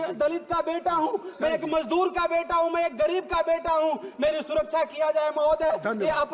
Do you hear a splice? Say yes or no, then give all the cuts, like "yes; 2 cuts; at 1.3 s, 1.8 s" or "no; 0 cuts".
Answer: no; 0 cuts